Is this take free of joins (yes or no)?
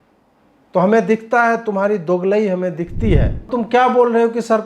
no